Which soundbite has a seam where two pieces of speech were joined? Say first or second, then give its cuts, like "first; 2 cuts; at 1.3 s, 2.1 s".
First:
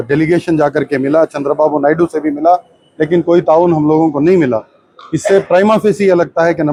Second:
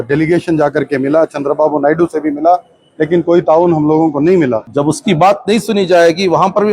second; 1 cut; at 4.6 s